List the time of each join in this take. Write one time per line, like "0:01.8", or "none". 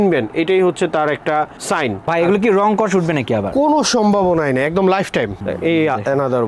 0:02.1
0:05.4